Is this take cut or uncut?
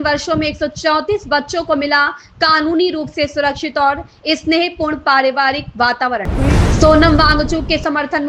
cut